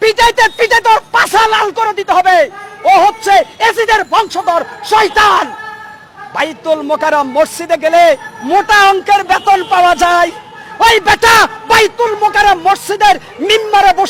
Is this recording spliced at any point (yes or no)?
no